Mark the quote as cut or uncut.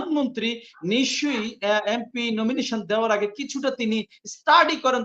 uncut